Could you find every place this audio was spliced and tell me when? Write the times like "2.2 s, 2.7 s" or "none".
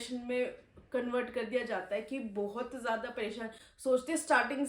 none

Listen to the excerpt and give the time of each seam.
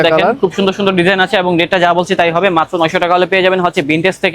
none

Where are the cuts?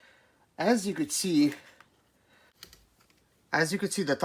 2.5 s

